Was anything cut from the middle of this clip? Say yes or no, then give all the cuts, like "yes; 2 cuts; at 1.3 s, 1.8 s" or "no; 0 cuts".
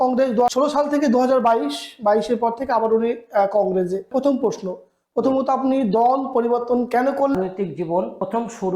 yes; 2 cuts; at 4.1 s, 7.3 s